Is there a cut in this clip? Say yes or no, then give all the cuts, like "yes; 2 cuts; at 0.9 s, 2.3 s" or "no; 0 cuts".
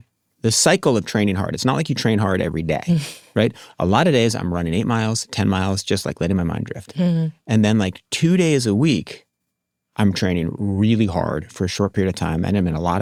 no; 0 cuts